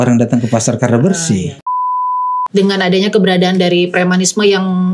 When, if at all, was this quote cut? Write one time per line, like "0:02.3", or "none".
0:02.0